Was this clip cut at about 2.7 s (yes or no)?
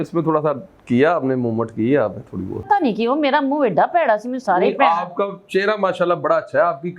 yes